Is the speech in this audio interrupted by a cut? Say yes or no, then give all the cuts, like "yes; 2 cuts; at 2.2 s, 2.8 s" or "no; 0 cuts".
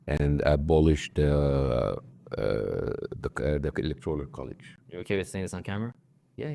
no; 0 cuts